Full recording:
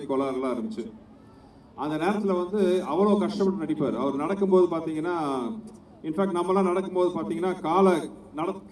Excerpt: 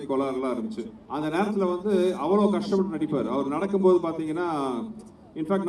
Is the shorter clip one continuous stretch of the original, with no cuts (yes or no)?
no